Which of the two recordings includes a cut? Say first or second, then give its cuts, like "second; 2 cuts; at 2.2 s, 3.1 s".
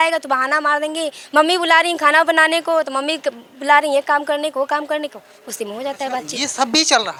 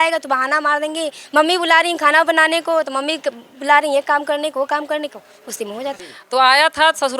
second; 1 cut; at 6.0 s